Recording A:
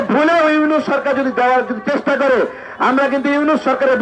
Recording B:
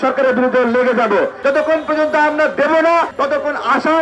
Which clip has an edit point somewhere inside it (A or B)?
B